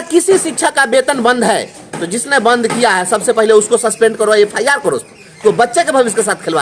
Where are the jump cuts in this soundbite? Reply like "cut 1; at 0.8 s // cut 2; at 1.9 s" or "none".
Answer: none